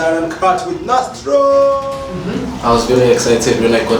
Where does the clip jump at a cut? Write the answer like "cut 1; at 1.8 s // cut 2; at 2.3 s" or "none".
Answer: cut 1; at 2.0 s